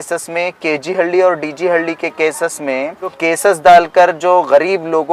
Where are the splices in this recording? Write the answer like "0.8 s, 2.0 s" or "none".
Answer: 3.2 s